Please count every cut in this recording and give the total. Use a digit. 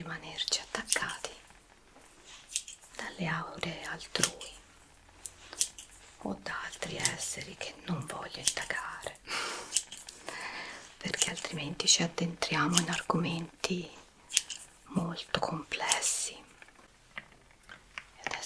1